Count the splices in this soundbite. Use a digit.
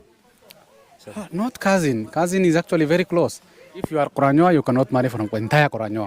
1